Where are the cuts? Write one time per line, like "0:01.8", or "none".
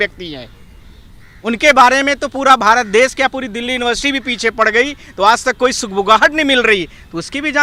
none